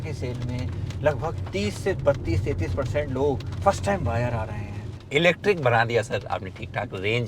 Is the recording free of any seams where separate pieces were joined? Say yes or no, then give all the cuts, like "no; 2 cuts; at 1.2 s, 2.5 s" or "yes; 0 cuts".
no; 1 cut; at 4.9 s